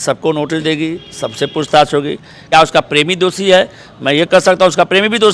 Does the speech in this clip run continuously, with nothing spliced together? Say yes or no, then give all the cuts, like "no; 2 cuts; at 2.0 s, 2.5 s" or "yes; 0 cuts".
no; 1 cut; at 2.4 s